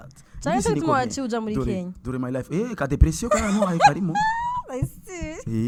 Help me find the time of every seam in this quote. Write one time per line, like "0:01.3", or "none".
none